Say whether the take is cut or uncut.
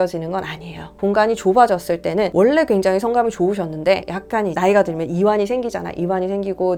uncut